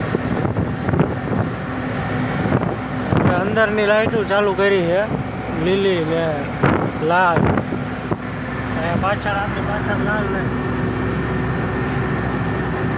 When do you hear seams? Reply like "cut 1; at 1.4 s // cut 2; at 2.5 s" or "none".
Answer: none